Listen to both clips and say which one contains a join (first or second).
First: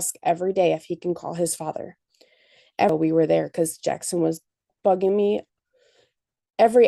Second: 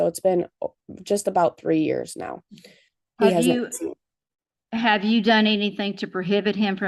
first